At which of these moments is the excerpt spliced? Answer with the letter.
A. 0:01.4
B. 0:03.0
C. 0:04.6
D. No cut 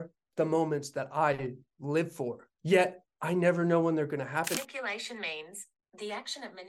C